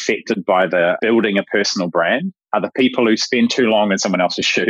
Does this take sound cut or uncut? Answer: cut